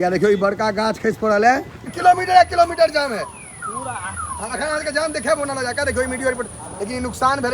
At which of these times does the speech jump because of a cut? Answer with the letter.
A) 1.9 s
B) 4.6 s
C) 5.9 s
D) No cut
A